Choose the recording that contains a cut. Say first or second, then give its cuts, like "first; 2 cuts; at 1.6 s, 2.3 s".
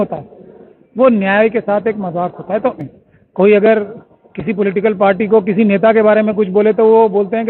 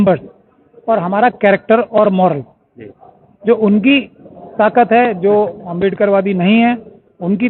first; 1 cut; at 2.8 s